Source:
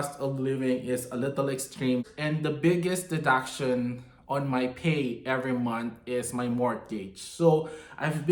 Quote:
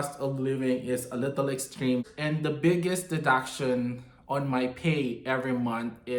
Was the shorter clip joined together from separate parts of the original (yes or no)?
no